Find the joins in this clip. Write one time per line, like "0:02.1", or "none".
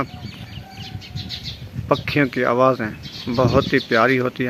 none